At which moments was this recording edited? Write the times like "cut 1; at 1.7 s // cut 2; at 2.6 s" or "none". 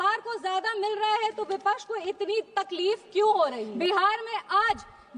cut 1; at 3.7 s